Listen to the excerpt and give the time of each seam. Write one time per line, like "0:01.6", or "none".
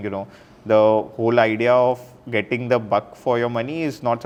none